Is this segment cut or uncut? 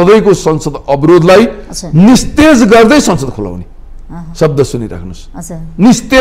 uncut